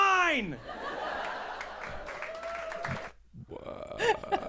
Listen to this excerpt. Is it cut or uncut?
uncut